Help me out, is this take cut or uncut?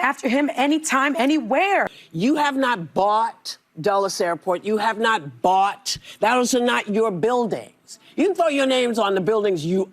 cut